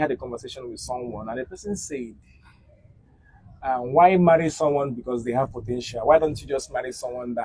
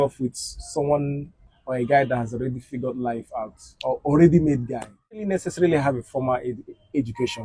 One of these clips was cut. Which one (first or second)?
second